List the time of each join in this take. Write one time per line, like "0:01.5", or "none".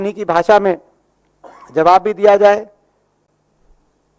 none